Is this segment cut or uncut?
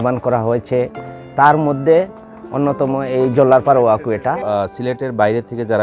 cut